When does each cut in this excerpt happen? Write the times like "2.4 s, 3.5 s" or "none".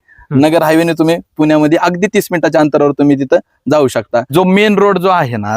4.3 s